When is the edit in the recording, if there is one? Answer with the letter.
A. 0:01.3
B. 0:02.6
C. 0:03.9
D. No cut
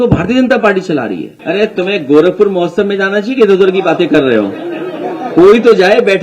A